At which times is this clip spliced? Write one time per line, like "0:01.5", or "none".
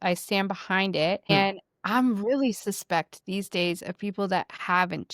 0:01.3